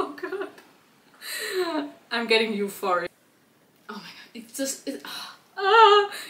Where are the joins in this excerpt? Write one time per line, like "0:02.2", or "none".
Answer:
0:03.1

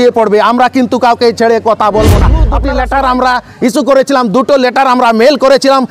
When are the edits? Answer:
0:02.3

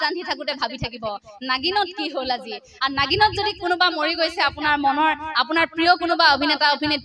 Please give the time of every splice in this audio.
none

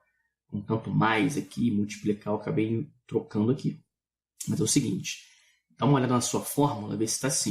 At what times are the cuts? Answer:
0:01.9

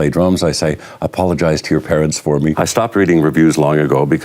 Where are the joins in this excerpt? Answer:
0:02.5

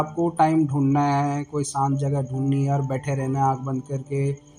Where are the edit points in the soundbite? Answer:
none

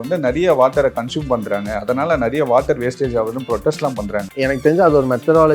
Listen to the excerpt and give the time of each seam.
0:04.3

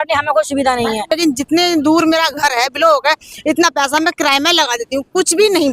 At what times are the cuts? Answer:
0:01.1

